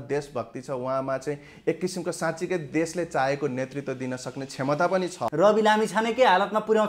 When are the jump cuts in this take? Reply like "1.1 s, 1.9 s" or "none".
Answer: 5.2 s